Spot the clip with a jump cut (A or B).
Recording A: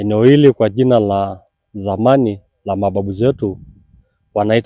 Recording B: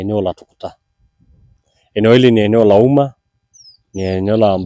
B